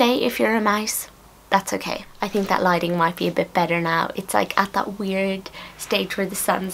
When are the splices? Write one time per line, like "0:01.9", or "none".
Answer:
none

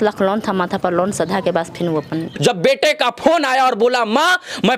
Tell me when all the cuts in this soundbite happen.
0:02.3

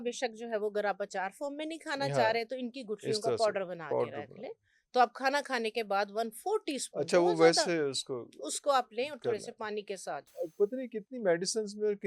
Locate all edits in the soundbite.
none

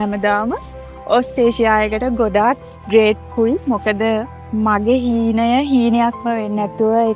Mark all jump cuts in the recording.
none

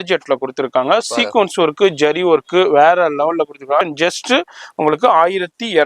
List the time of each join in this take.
0:03.8

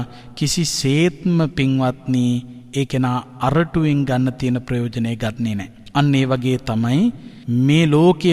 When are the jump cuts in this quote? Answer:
0:05.7
0:07.3

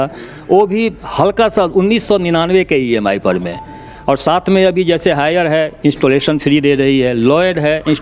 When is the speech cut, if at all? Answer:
none

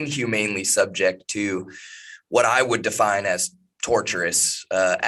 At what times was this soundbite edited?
none

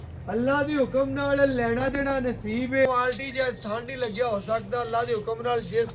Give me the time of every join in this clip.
0:02.9

